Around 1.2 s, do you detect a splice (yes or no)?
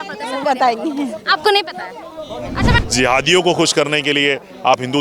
no